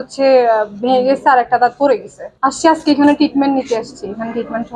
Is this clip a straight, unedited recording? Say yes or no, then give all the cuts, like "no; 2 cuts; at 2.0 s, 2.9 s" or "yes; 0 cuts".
no; 1 cut; at 2.2 s